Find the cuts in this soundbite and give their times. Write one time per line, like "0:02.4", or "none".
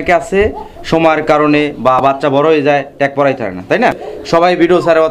0:04.1